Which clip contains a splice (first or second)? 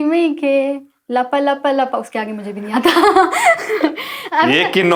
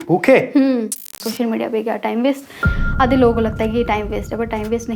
second